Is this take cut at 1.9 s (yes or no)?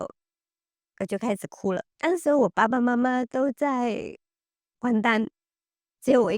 yes